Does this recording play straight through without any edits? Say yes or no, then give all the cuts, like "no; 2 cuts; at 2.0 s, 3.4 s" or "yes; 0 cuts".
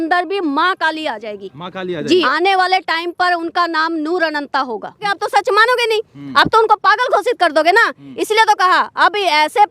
no; 2 cuts; at 2.3 s, 5.1 s